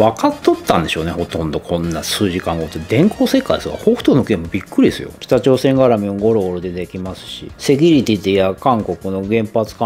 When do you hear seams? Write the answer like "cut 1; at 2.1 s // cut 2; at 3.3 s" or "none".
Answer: cut 1; at 5.1 s